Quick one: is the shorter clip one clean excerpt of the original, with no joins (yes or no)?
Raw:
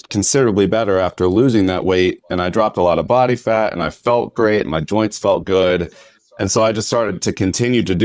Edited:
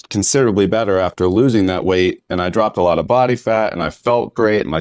yes